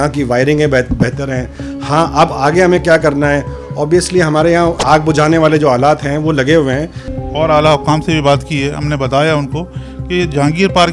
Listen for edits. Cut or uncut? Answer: cut